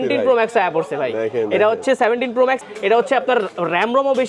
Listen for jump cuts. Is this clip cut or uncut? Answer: cut